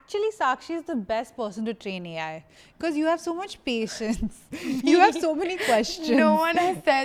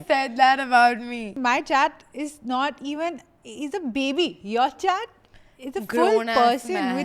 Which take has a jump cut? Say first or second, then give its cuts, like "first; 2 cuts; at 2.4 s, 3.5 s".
second; 1 cut; at 1.3 s